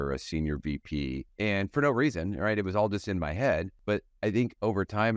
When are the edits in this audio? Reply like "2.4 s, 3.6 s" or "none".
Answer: 1.3 s, 3.7 s